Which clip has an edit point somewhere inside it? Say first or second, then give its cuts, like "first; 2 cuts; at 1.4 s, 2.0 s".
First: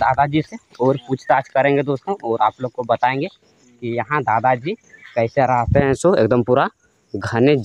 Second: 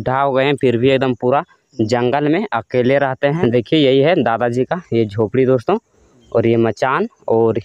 second; 1 cut; at 3.4 s